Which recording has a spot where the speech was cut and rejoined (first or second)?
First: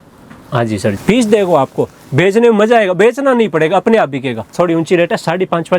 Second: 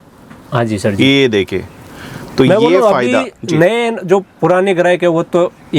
first